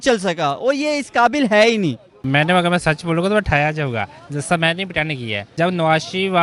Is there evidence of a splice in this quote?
yes; 2 cuts; at 2.2 s, 5.5 s

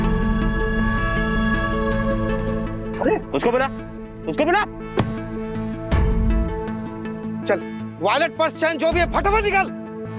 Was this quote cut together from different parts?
no; 0 cuts

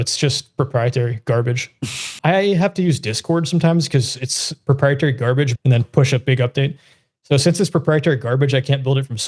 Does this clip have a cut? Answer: yes; 2 cuts; at 2.1 s, 5.5 s

